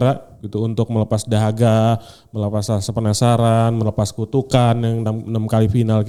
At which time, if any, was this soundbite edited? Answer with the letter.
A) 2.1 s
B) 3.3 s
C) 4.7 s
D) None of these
D